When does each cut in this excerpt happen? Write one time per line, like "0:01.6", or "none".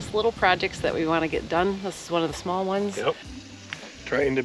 0:03.3